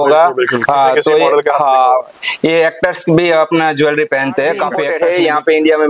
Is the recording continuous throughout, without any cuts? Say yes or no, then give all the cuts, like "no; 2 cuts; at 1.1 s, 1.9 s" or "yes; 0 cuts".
no; 1 cut; at 4.8 s